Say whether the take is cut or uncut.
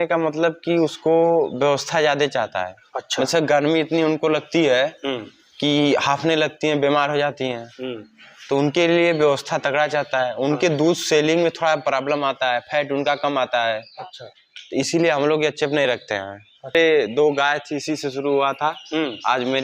cut